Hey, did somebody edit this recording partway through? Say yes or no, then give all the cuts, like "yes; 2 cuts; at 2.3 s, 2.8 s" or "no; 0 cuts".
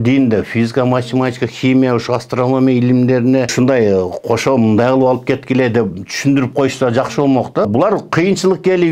yes; 2 cuts; at 3.5 s, 7.6 s